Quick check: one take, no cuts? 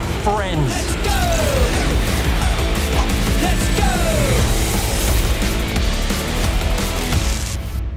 yes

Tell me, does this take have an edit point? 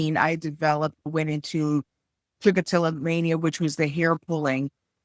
yes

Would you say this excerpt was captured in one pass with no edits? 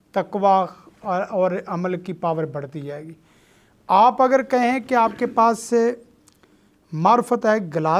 yes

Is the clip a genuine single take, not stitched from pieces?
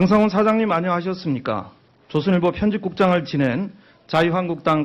yes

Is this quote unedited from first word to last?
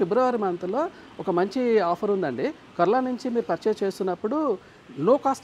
yes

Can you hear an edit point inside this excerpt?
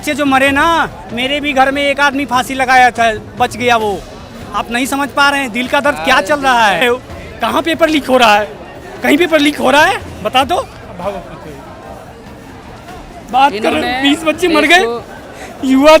yes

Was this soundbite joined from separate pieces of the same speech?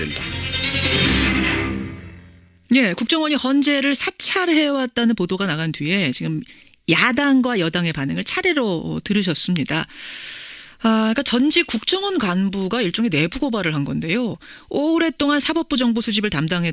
yes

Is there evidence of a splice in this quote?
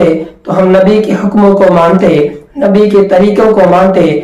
no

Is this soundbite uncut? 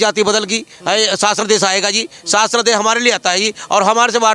yes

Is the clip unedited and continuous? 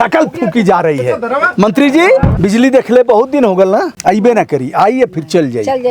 no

